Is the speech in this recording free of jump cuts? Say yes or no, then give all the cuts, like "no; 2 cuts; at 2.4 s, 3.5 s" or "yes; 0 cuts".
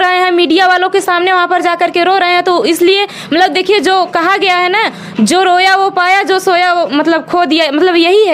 yes; 0 cuts